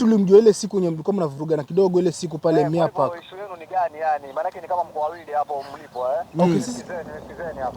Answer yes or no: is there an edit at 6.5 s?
yes